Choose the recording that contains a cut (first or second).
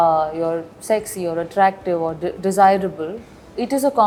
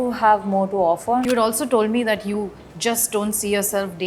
second